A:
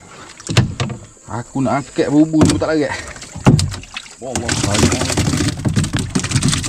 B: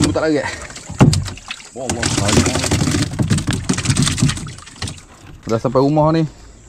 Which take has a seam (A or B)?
B